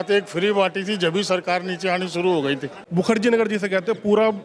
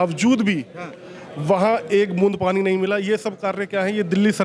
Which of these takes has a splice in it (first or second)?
first